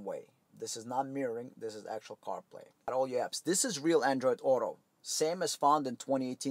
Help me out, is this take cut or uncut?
cut